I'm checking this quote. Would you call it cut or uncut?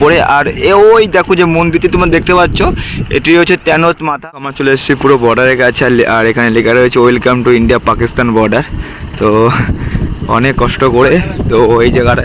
cut